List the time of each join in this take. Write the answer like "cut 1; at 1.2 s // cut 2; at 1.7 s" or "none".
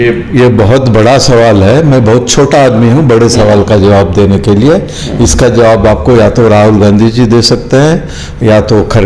none